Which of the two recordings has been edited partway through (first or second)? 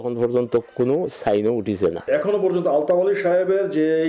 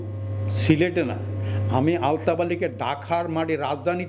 first